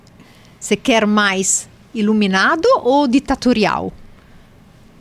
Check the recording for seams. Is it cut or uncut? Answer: uncut